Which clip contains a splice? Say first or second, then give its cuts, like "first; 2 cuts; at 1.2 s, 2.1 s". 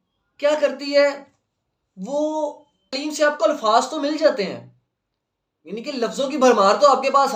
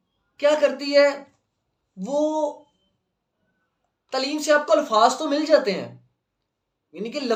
first; 1 cut; at 2.9 s